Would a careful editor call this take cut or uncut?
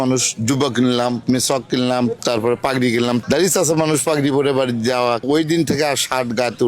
cut